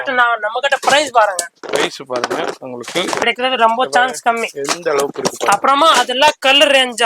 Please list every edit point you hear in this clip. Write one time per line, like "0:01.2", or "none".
0:03.2